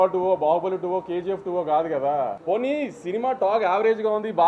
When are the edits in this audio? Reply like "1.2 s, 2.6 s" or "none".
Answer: 2.4 s